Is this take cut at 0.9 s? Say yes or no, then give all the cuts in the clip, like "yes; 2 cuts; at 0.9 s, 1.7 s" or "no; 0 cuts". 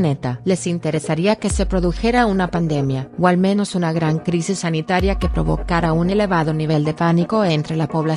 no; 1 cut; at 3.9 s